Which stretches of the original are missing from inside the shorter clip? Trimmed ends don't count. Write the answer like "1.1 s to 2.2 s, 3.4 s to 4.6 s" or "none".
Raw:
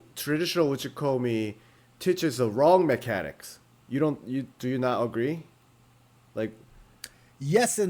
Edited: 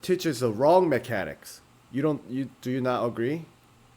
none